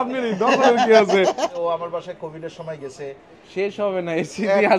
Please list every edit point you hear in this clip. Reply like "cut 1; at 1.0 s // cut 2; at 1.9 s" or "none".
cut 1; at 1.5 s